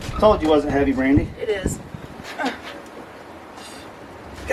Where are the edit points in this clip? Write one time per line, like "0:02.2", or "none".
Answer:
none